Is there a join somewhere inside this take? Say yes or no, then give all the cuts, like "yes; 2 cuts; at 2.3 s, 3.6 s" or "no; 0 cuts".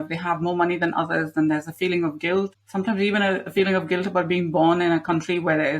yes; 1 cut; at 2.6 s